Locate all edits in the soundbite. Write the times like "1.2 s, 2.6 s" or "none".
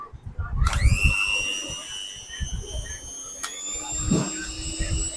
none